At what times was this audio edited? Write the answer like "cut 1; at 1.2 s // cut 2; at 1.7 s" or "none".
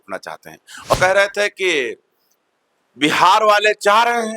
cut 1; at 0.9 s